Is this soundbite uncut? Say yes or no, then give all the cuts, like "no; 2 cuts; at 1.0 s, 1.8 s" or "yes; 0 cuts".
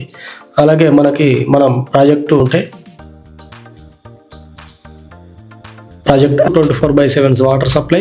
no; 2 cuts; at 2.4 s, 6.5 s